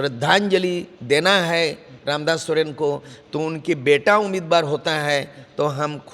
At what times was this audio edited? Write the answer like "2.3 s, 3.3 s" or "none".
none